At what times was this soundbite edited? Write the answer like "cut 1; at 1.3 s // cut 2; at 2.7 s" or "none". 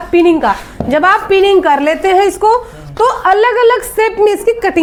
none